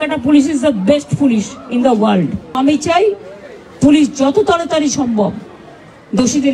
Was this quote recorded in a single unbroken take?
no; 1 cut; at 2.5 s

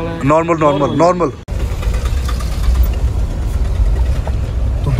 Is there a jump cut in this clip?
yes; 1 cut; at 1.5 s

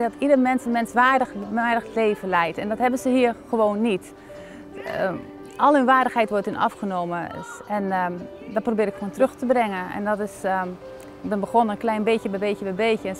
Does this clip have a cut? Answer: no; 0 cuts

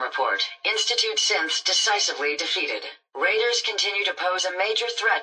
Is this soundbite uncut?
no; 1 cut; at 3.0 s

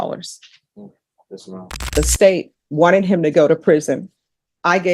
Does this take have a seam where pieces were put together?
yes; 1 cut; at 1.9 s

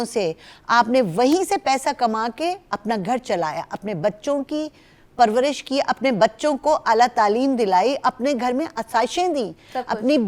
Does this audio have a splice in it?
no; 0 cuts

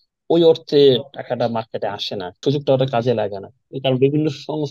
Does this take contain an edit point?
yes; 2 cuts; at 2.4 s, 3.7 s

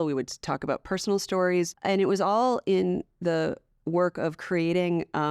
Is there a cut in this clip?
yes; 1 cut; at 1.8 s

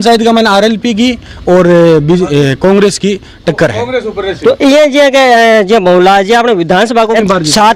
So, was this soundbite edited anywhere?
no; 0 cuts

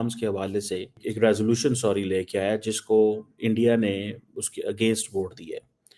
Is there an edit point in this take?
yes; 1 cut; at 0.9 s

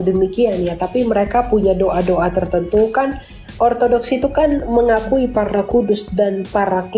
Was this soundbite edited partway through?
no; 0 cuts

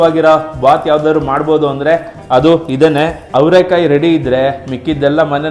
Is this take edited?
yes; 1 cut; at 3.3 s

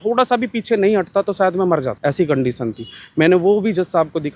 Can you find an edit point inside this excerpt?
no; 0 cuts

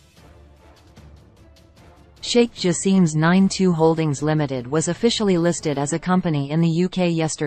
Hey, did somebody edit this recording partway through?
no; 0 cuts

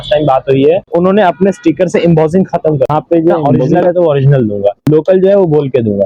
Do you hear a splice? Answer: yes; 2 cuts; at 3.6 s, 4.9 s

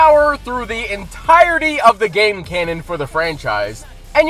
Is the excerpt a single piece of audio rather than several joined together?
yes; 0 cuts

